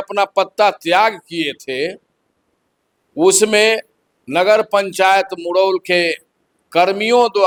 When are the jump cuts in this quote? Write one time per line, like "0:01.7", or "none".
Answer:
none